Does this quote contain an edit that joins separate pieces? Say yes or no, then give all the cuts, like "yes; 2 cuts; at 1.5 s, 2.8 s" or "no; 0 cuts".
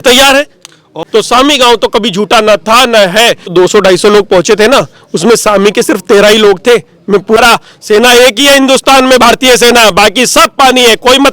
yes; 3 cuts; at 1.0 s, 3.5 s, 7.4 s